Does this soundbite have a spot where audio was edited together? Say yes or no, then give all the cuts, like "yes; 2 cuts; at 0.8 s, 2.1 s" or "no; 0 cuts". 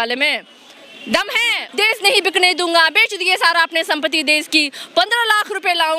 yes; 1 cut; at 1.6 s